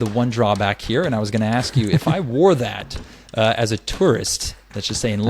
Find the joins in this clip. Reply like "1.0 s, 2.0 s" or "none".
none